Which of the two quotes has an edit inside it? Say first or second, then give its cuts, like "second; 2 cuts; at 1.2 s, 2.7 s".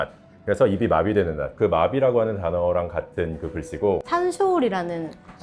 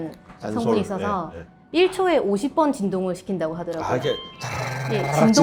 first; 1 cut; at 4.0 s